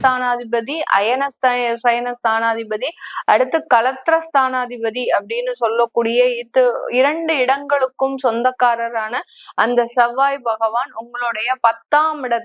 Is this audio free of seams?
yes; 0 cuts

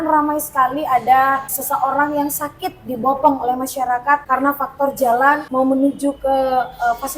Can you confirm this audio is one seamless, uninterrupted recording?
no; 3 cuts; at 1.5 s, 4.2 s, 5.5 s

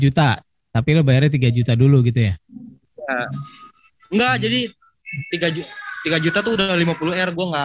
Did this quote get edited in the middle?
no; 0 cuts

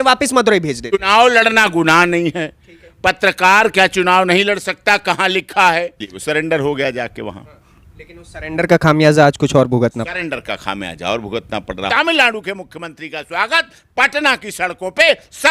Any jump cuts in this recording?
yes; 3 cuts; at 0.9 s, 6.1 s, 11.8 s

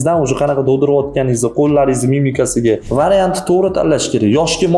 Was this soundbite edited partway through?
yes; 1 cut; at 2.9 s

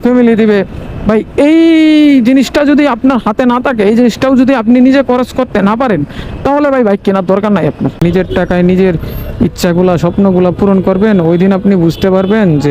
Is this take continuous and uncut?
no; 1 cut; at 8.0 s

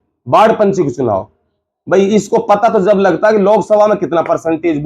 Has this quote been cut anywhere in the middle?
no; 0 cuts

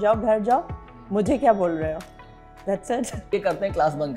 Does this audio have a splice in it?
yes; 1 cut; at 3.2 s

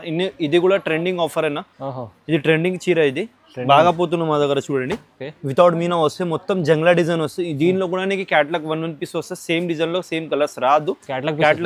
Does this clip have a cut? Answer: no; 0 cuts

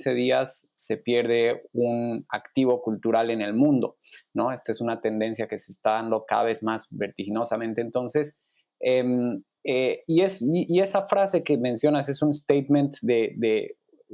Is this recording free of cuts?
yes; 0 cuts

